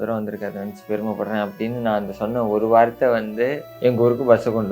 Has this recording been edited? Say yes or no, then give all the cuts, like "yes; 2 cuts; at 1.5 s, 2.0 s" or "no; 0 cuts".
yes; 1 cut; at 3.7 s